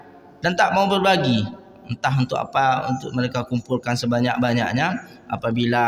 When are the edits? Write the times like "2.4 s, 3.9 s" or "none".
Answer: none